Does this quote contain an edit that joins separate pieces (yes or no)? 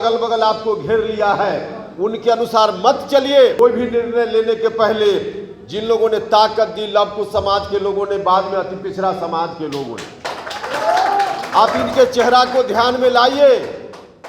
no